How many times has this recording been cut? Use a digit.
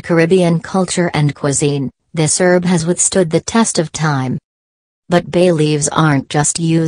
0